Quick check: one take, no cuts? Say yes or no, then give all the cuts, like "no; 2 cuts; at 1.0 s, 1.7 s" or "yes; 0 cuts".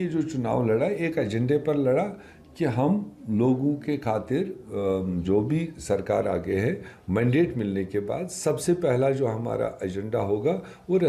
yes; 0 cuts